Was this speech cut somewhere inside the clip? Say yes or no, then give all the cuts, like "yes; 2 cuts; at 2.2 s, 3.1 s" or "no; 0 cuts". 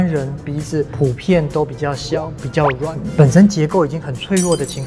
yes; 2 cuts; at 0.9 s, 3.0 s